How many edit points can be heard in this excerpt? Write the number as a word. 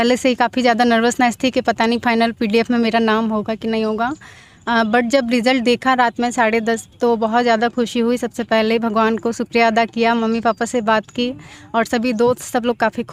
zero